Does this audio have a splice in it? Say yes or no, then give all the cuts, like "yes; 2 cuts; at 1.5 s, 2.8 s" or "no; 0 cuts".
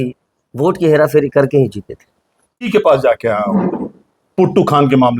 yes; 1 cut; at 2.7 s